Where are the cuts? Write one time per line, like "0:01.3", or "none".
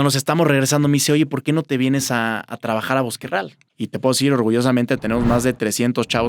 0:03.6